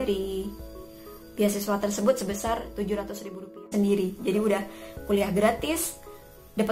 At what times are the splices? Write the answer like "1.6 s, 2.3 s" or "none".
3.7 s

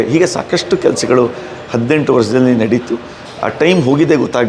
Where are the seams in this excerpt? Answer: none

